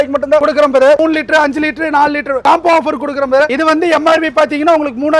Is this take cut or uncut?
cut